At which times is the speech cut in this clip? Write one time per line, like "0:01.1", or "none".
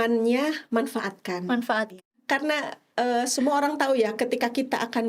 0:02.1